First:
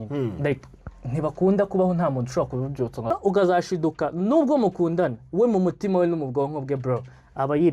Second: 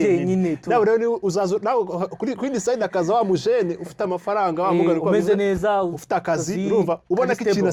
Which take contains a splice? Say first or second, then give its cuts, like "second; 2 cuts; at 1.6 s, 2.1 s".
first; 1 cut; at 3.1 s